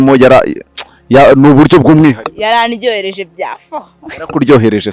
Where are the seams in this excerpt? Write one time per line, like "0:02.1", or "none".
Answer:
none